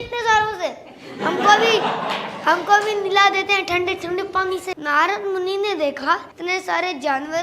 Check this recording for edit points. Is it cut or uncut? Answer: cut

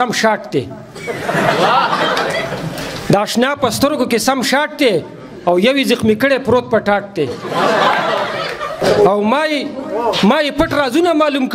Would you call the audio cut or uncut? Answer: cut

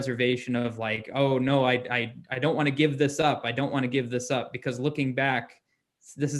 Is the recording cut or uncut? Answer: uncut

